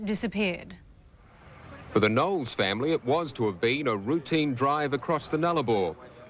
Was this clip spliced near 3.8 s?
yes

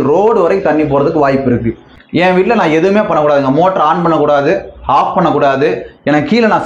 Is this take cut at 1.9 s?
yes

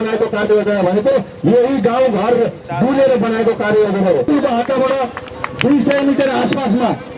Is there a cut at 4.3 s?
yes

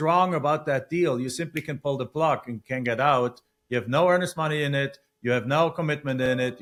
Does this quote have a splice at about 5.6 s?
no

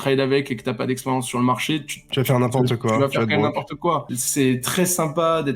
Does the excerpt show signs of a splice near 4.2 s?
yes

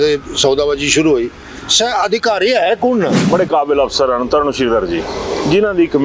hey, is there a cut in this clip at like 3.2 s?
yes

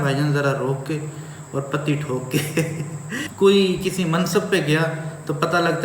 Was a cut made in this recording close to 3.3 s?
yes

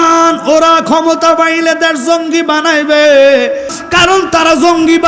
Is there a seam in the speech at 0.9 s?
no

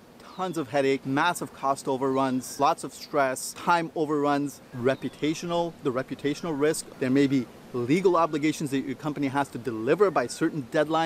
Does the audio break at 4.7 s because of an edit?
yes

